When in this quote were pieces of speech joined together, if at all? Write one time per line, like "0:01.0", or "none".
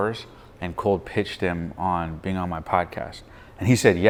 none